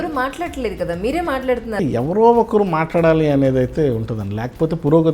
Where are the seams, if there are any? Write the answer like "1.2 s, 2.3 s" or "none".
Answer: 1.8 s